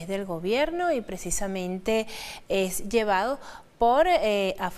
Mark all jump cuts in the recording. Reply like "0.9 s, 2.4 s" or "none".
3.5 s